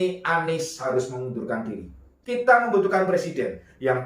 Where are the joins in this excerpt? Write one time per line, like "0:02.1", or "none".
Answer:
0:02.1